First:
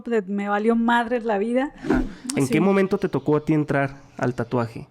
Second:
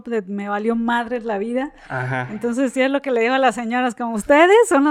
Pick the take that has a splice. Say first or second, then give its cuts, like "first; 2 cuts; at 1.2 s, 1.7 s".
first; 1 cut; at 2.0 s